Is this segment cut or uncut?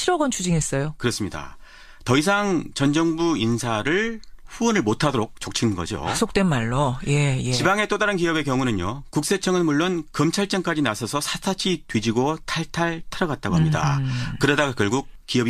cut